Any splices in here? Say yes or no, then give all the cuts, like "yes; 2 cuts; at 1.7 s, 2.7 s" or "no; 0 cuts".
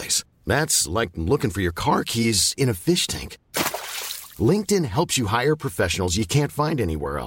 no; 0 cuts